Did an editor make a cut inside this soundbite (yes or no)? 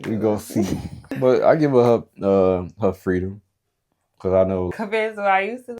yes